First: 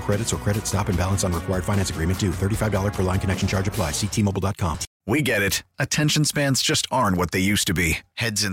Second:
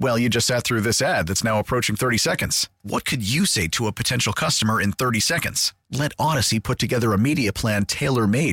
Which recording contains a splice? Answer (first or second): first